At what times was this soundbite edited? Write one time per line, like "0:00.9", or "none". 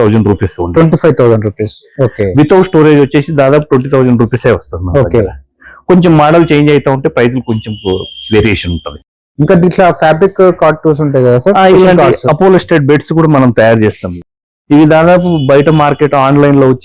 none